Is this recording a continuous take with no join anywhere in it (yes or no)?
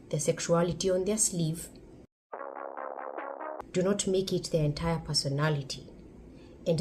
no